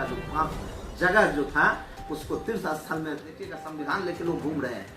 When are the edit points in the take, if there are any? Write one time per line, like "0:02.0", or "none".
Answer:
0:03.4